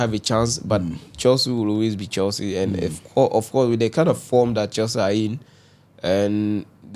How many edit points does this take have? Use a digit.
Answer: 0